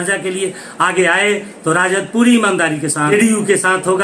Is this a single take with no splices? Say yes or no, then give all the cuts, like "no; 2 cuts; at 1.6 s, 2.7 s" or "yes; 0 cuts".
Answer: no; 1 cut; at 3.1 s